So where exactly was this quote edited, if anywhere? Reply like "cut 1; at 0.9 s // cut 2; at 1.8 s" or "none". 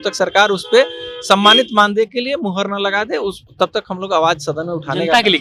none